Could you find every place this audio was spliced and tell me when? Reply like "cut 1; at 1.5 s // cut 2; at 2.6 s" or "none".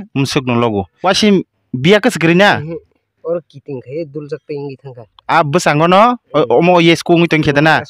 cut 1; at 0.9 s